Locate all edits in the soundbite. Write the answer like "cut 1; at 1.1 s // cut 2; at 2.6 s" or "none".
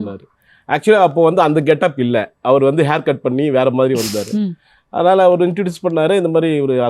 none